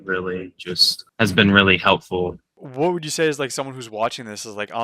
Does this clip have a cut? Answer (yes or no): yes